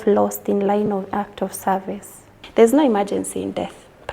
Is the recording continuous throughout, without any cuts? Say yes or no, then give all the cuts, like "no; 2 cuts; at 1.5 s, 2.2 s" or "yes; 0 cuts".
no; 1 cut; at 2.3 s